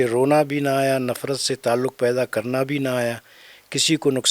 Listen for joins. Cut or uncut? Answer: uncut